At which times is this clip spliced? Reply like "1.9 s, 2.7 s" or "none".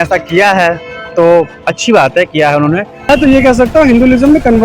3.0 s